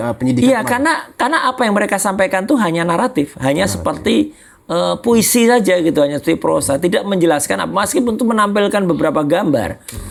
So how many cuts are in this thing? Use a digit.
0